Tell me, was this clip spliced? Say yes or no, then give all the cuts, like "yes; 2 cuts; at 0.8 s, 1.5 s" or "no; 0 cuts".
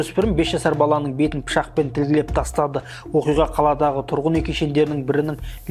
no; 0 cuts